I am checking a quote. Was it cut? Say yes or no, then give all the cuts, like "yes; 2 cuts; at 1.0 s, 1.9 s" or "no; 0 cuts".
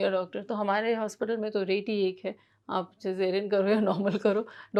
no; 0 cuts